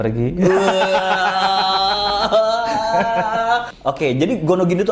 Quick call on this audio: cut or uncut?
cut